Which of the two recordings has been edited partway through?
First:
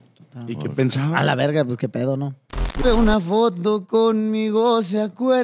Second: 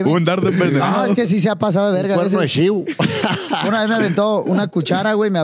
first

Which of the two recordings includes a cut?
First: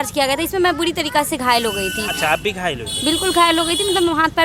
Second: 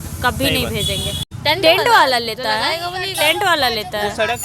second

